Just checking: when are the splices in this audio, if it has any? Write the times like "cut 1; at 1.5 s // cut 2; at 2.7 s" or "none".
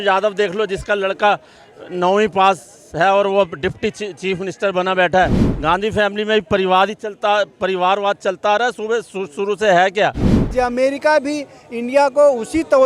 cut 1; at 5.5 s // cut 2; at 10.5 s